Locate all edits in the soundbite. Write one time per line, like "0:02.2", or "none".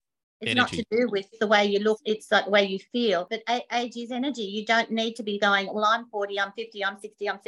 0:01.4
0:02.0
0:03.3